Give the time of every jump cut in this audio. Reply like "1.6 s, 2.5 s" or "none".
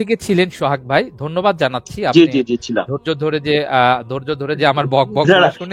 none